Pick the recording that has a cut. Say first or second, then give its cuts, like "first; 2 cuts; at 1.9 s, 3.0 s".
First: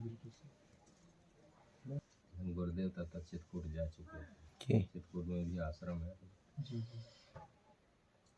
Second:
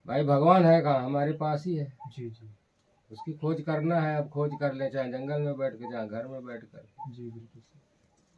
first; 1 cut; at 2.0 s